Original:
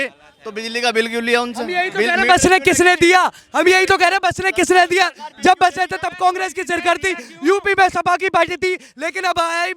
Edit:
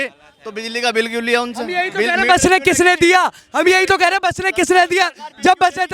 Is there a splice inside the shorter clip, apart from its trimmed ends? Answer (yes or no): no